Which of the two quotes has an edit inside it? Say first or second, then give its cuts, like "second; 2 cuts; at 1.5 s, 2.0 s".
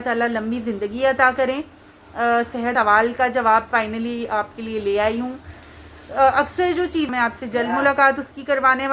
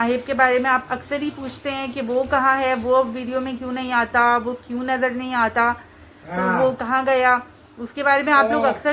first; 2 cuts; at 2.7 s, 7.1 s